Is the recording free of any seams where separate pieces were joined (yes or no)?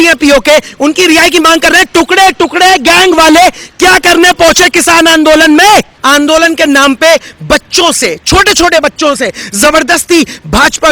no